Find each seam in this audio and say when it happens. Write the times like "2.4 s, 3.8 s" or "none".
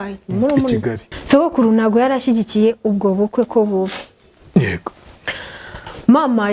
1.0 s